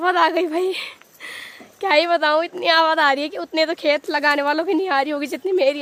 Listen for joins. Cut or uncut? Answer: uncut